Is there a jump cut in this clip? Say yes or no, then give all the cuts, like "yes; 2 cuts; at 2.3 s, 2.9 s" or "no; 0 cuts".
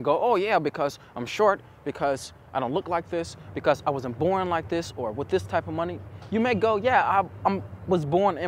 no; 0 cuts